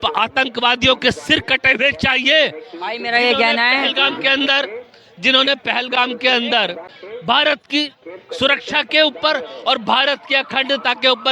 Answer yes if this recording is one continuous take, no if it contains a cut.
no